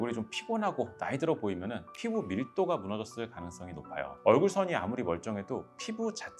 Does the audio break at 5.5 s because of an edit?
no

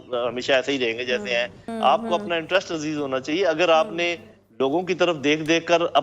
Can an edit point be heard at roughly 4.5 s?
no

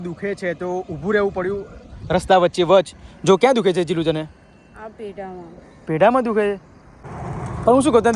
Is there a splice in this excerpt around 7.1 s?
yes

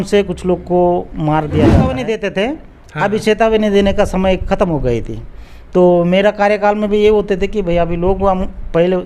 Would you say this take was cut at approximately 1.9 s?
yes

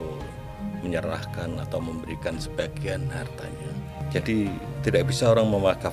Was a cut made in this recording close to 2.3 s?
no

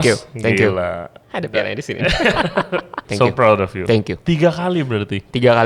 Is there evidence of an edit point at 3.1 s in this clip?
yes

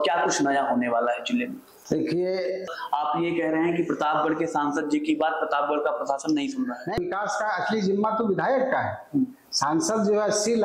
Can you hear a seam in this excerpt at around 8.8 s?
no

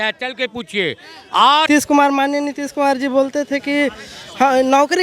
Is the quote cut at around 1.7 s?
yes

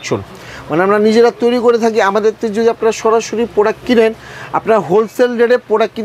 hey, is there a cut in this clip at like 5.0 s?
no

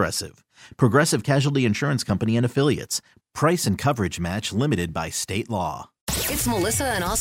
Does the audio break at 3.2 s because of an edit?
no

